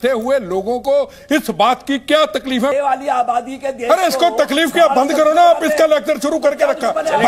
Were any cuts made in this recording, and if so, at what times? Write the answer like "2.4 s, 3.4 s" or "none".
2.7 s